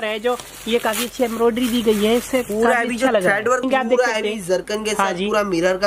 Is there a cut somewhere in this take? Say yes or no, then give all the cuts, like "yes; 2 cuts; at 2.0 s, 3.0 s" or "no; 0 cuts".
yes; 1 cut; at 3.6 s